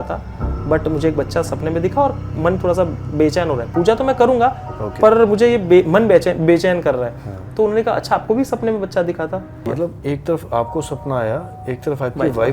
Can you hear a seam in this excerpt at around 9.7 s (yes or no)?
yes